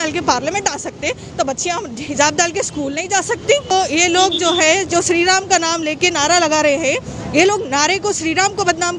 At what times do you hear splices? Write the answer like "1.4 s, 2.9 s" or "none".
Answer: 3.7 s